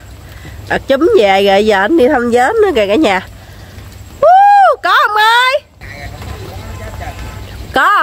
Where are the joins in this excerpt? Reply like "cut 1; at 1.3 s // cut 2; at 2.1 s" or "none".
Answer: cut 1; at 5.8 s